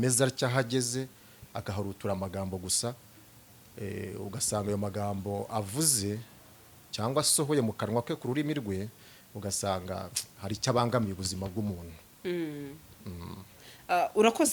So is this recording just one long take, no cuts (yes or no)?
yes